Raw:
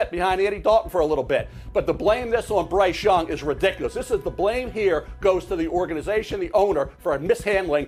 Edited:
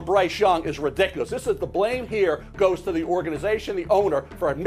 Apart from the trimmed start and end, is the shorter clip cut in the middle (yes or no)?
no